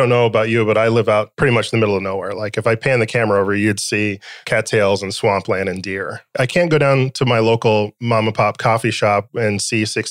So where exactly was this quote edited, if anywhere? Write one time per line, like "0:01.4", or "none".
0:01.3
0:04.3
0:06.3